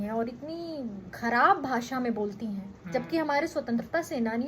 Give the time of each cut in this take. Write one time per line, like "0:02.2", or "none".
0:01.1
0:02.7